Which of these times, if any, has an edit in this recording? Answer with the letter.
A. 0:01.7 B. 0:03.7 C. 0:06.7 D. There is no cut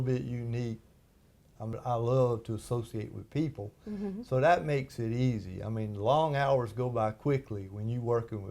A